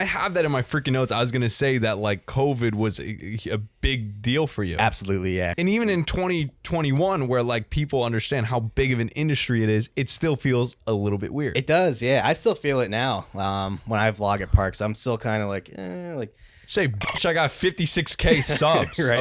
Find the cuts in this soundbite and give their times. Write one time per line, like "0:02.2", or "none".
0:05.5